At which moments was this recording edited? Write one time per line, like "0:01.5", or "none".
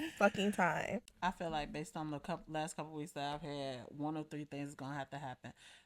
0:01.0